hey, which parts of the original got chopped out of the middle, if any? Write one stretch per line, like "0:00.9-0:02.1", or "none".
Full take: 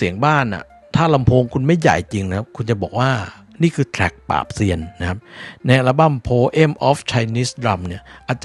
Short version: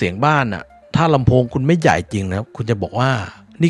none